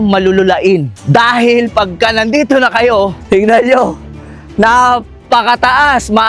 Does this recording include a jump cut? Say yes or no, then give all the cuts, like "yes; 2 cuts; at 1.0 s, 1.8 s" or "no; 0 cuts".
yes; 2 cuts; at 1.0 s, 3.2 s